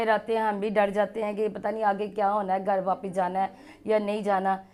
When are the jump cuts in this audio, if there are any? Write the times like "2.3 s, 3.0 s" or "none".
none